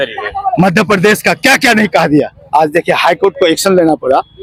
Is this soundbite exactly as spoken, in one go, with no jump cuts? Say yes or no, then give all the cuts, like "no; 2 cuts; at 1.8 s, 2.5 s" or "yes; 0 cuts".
yes; 0 cuts